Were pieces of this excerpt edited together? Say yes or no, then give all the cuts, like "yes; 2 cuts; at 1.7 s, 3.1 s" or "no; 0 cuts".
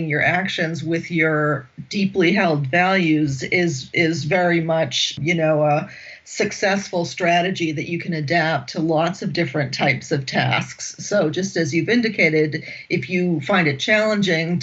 yes; 1 cut; at 5.2 s